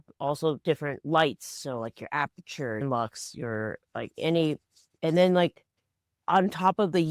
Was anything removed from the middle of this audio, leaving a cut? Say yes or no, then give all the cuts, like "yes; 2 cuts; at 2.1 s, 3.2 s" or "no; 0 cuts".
yes; 1 cut; at 2.8 s